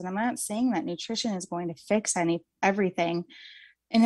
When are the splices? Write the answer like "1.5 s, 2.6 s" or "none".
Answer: none